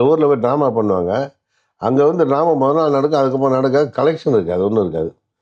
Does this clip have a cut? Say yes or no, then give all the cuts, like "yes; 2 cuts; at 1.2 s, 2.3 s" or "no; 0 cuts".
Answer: no; 0 cuts